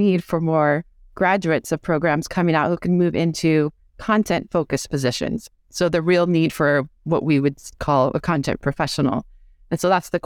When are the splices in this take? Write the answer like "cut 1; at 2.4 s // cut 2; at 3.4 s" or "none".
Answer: none